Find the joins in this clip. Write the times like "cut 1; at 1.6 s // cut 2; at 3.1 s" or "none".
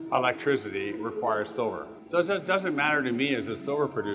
cut 1; at 1.9 s